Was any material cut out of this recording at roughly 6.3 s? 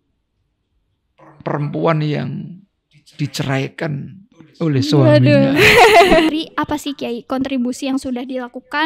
yes; 1 cut; at 6.3 s

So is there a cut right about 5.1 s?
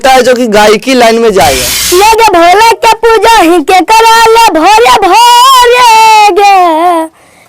no; 1 cut; at 1.7 s

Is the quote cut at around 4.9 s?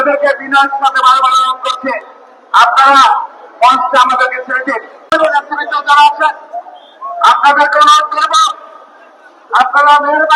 yes; 1 cut; at 4.9 s

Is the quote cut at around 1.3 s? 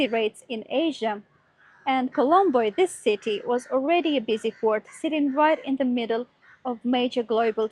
no; 0 cuts

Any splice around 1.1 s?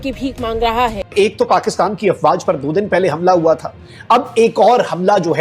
yes; 1 cut; at 1.1 s

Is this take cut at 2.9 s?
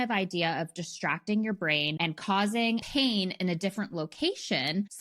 yes; 2 cuts; at 1.9 s, 2.9 s

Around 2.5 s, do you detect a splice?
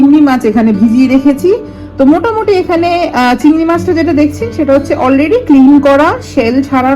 no; 0 cuts

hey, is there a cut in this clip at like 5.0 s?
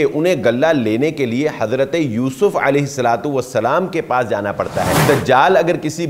yes; 1 cut; at 5.0 s

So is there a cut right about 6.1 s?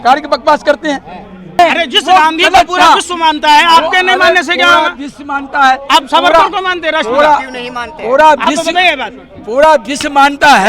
no; 1 cut; at 1.6 s

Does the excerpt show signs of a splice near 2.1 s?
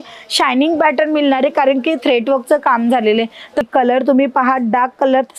no; 1 cut; at 3.7 s

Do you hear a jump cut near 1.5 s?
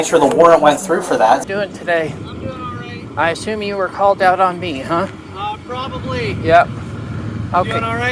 yes; 1 cut; at 1.5 s

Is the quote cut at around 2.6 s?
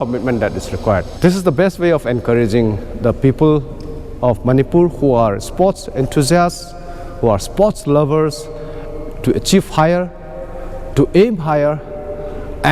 no; 1 cut; at 1.1 s

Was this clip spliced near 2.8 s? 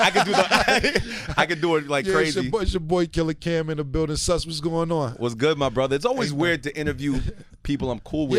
yes; 1 cut; at 2.8 s

